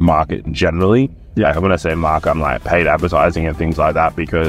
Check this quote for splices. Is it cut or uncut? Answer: uncut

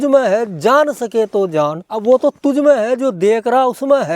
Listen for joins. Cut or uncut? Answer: cut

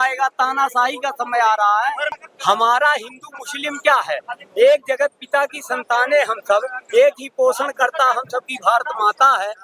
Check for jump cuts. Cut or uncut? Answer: cut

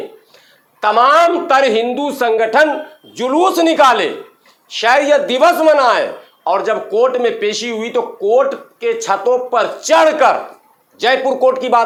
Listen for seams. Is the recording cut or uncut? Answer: uncut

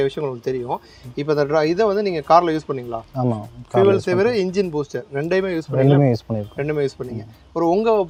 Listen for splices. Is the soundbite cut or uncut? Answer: uncut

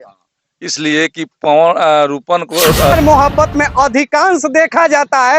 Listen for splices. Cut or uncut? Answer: cut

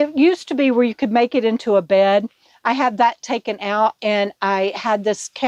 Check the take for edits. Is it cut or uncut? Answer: uncut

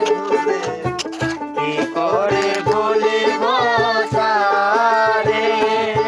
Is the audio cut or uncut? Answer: uncut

